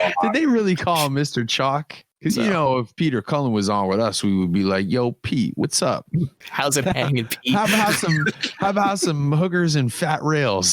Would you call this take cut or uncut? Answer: cut